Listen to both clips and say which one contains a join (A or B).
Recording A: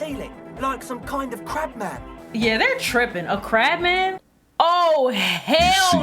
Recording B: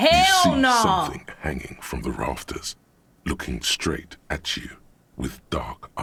A